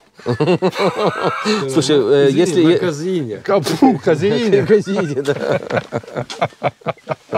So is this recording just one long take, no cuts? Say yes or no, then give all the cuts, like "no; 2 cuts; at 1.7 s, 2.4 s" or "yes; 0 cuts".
yes; 0 cuts